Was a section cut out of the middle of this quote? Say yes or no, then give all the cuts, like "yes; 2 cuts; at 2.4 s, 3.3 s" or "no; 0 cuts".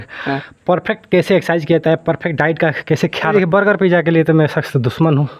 yes; 1 cut; at 3.3 s